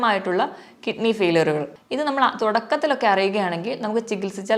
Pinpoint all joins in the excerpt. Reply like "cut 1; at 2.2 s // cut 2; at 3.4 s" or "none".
cut 1; at 1.8 s